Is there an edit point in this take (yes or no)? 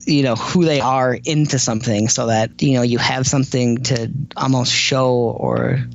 yes